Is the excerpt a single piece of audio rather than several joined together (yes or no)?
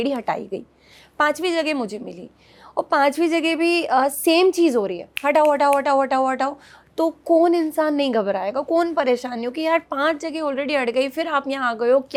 yes